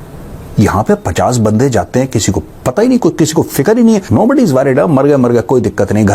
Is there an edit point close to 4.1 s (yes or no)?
yes